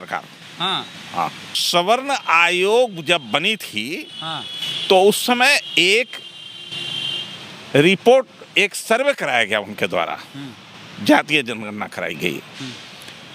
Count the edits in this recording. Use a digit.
1